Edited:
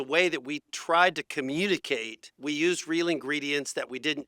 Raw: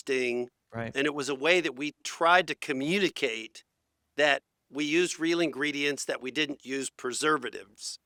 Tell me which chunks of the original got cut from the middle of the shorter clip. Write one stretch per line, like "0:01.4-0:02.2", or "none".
0:03.6-0:04.6